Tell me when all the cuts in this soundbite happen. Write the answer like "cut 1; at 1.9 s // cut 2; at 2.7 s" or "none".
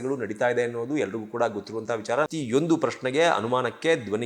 cut 1; at 2.3 s